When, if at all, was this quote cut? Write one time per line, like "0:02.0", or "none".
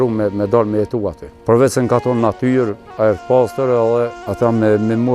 0:01.3
0:04.2